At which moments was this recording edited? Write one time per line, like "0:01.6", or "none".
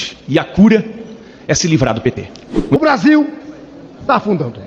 0:02.8